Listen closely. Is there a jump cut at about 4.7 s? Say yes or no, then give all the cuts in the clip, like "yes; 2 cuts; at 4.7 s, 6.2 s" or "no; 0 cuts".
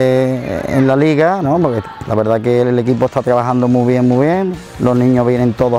yes; 1 cut; at 4.7 s